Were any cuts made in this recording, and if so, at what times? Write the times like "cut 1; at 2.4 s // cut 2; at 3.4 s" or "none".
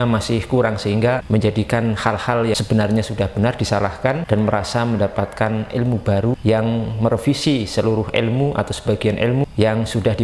cut 1; at 1.2 s // cut 2; at 2.6 s // cut 3; at 4.2 s // cut 4; at 6.3 s // cut 5; at 9.5 s